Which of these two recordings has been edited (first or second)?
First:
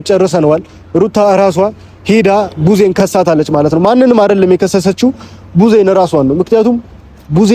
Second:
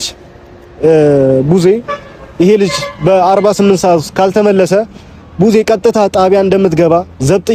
first